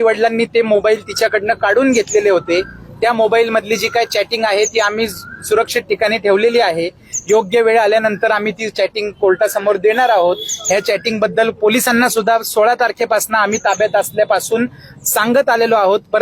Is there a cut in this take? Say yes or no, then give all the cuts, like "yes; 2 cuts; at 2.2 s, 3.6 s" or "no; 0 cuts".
no; 0 cuts